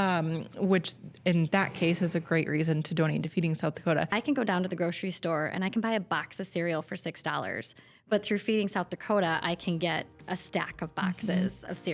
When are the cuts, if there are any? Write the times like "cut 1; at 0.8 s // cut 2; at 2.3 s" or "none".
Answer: cut 1; at 4.1 s